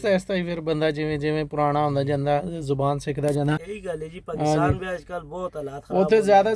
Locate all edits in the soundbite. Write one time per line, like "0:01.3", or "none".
0:03.7